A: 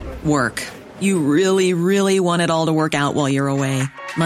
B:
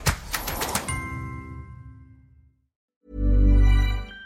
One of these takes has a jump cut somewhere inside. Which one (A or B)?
B